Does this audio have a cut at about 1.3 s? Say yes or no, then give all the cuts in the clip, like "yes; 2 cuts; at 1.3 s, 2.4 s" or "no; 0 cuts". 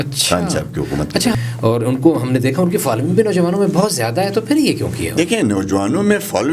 yes; 1 cut; at 1.3 s